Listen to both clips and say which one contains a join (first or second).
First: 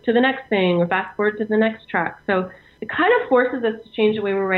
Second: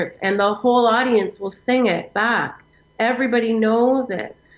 first